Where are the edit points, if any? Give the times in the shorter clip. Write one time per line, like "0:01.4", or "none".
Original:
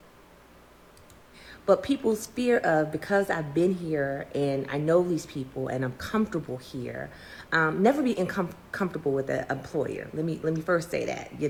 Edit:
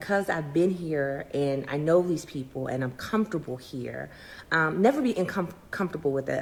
none